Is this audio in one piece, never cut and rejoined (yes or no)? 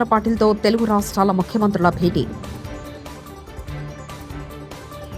yes